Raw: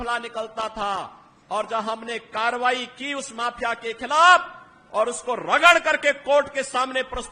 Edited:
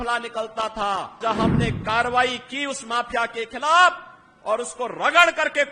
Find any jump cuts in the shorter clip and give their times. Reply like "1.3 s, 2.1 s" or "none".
1.2 s